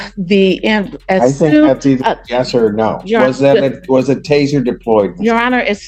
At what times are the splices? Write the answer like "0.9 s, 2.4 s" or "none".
none